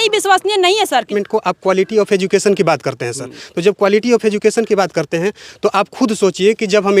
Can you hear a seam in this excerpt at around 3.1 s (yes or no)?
no